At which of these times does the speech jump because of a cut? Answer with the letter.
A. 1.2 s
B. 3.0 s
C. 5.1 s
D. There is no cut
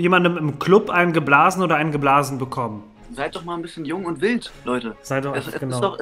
B